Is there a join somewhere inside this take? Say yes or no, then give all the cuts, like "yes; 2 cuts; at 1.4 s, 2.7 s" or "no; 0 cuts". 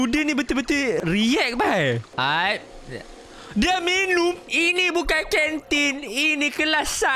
yes; 3 cuts; at 1.0 s, 2.1 s, 4.4 s